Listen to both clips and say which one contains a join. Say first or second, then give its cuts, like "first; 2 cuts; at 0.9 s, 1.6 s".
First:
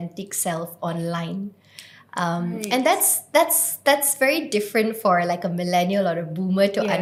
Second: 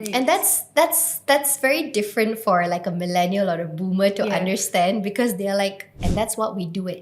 second; 1 cut; at 6.0 s